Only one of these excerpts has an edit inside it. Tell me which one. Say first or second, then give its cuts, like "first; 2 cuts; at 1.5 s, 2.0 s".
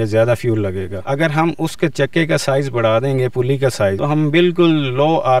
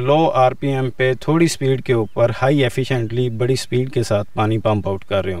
first; 2 cuts; at 0.9 s, 4.0 s